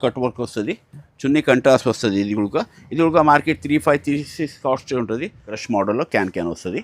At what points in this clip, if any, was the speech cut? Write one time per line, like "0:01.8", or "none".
0:05.6